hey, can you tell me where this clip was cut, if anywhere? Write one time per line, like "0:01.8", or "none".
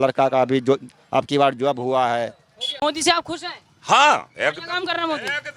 0:02.8